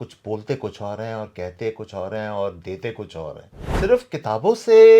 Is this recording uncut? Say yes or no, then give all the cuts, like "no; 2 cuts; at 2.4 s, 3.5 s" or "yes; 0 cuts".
no; 1 cut; at 3.7 s